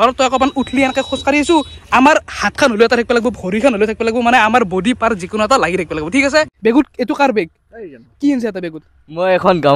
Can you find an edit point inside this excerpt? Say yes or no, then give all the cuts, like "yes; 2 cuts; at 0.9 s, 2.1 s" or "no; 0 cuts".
yes; 1 cut; at 6.5 s